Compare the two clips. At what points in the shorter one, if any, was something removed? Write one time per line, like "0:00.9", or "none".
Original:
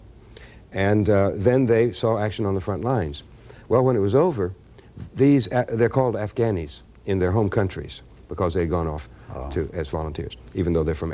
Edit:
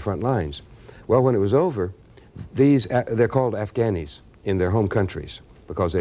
none